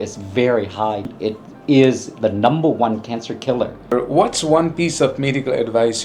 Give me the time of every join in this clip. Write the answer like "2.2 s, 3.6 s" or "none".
1.1 s, 3.9 s

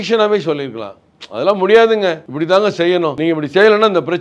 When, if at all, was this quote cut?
2.3 s, 3.2 s

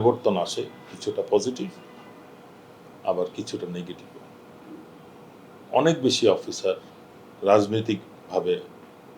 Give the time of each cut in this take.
none

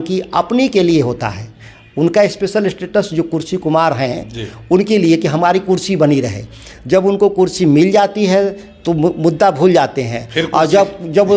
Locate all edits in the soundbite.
none

